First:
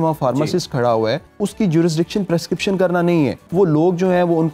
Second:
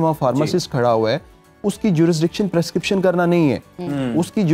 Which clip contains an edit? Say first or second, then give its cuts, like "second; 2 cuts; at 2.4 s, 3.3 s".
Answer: first; 2 cuts; at 1.3 s, 3.4 s